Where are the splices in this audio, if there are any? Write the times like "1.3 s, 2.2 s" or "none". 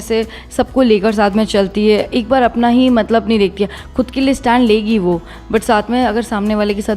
none